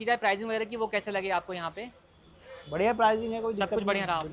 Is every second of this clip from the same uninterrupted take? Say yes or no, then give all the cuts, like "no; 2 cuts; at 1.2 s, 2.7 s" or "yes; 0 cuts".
yes; 0 cuts